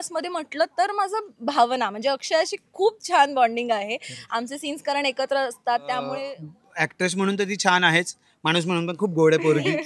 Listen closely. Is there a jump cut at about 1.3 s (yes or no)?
no